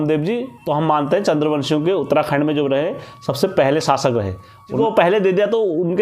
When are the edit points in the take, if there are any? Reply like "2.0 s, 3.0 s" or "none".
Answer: 4.7 s